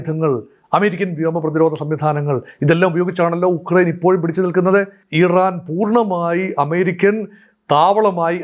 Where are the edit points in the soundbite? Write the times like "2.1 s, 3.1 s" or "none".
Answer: 5.0 s